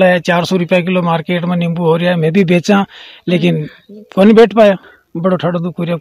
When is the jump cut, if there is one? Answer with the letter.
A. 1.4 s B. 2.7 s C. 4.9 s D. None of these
C